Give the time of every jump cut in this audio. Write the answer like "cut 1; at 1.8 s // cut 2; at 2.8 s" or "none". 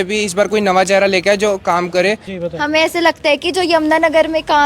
cut 1; at 2.3 s